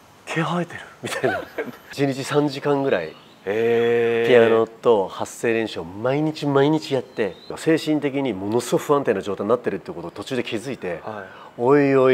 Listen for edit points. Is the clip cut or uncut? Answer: cut